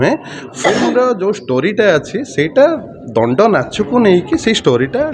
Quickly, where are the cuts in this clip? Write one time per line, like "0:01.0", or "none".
none